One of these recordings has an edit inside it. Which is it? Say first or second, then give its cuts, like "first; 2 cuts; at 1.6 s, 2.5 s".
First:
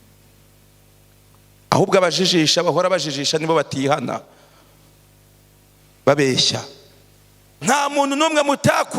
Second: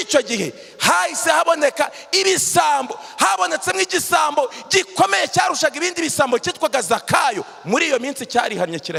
first; 1 cut; at 7.5 s